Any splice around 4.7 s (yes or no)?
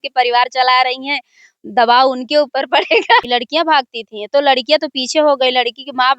no